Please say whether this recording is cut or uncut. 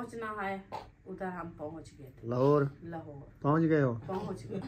cut